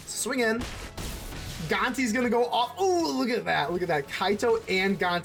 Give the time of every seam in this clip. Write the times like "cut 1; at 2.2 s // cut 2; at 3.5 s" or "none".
none